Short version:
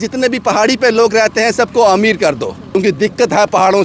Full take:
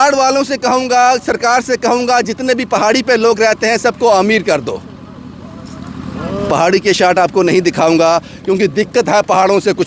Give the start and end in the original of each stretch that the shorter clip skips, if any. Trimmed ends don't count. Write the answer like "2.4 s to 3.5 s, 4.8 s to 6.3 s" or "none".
4.9 s to 8.4 s